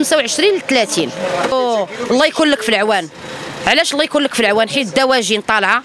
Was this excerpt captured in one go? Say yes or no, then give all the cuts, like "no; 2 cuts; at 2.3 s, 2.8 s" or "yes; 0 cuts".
no; 1 cut; at 1.5 s